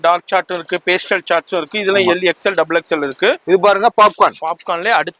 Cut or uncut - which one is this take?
uncut